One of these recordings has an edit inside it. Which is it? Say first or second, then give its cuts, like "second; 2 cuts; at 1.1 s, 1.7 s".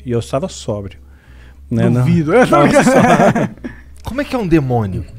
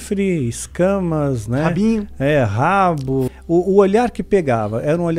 second; 1 cut; at 3.3 s